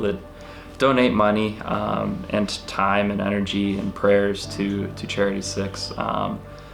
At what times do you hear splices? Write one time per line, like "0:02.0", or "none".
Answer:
none